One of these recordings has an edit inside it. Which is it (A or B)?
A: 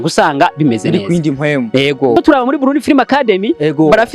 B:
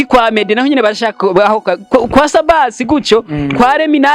A